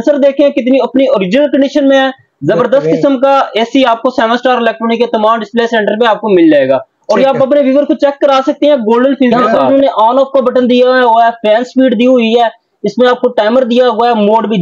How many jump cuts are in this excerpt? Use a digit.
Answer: 1